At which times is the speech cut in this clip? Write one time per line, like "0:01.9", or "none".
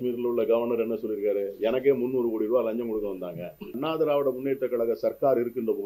0:03.8